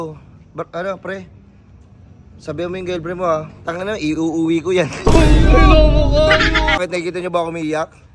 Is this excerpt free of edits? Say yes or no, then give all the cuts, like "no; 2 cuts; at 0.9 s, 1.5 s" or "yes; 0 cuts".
no; 1 cut; at 6.8 s